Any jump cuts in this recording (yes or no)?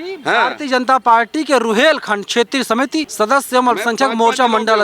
yes